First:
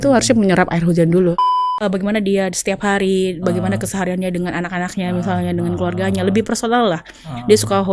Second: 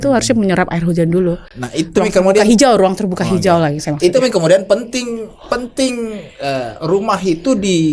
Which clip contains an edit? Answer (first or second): first